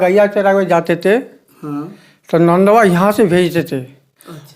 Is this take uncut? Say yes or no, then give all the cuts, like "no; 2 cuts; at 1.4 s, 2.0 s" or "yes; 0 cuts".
yes; 0 cuts